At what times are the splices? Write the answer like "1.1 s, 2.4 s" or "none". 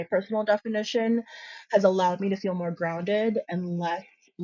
none